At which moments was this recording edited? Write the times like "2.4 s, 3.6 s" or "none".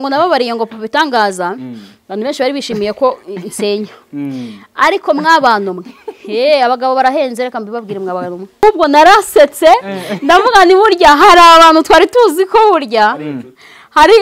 8.6 s